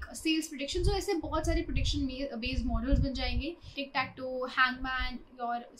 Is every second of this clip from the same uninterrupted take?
no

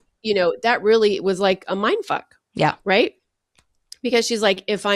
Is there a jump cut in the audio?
no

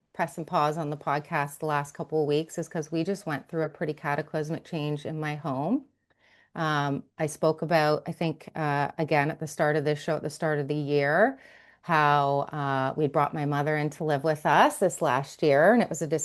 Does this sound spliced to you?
no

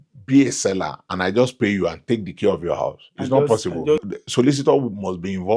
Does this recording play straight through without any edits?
no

